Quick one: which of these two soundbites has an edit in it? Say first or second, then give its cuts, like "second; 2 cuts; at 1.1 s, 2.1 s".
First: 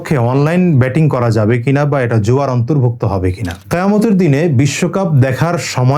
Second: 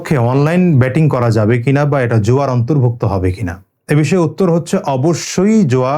first; 1 cut; at 3.6 s